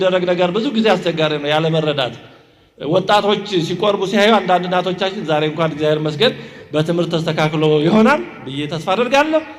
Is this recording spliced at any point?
no; 0 cuts

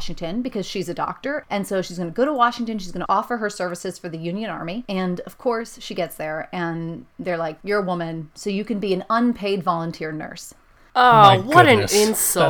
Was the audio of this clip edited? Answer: yes; 3 cuts; at 1.4 s, 4.8 s, 8.3 s

